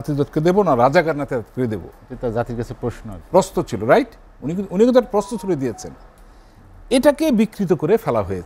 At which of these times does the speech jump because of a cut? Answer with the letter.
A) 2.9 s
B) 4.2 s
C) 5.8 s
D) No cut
D